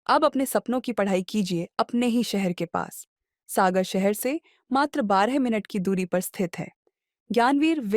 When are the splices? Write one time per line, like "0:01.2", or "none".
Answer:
none